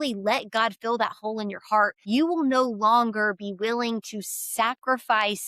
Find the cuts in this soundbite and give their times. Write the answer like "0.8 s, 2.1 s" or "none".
2.0 s